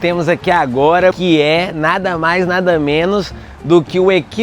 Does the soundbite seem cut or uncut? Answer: cut